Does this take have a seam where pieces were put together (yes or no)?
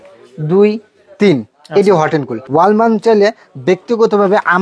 yes